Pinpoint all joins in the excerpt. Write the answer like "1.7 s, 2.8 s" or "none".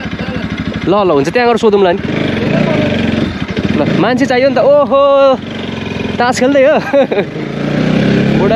none